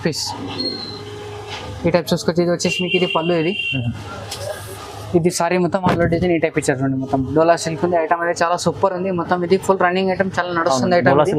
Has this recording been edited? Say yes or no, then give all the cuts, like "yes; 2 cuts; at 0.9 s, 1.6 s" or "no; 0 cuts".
no; 0 cuts